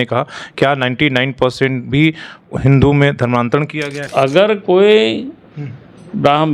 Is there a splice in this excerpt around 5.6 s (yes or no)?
no